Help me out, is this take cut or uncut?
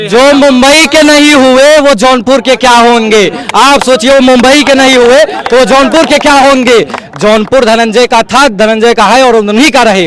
uncut